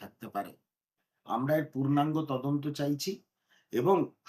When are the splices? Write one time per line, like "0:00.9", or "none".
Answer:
none

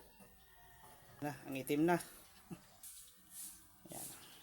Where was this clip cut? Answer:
0:01.2
0:02.9

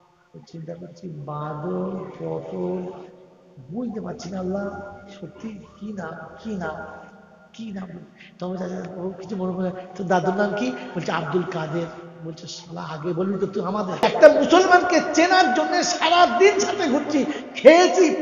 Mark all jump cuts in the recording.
0:14.0

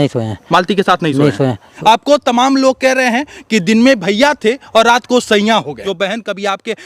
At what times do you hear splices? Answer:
0:01.7
0:05.8

